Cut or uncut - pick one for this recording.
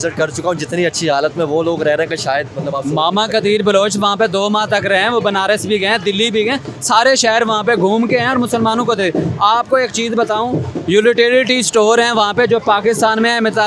uncut